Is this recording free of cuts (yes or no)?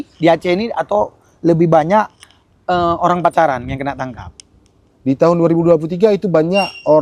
yes